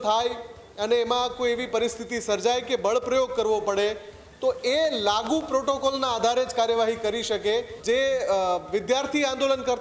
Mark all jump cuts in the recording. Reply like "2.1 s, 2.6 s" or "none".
7.7 s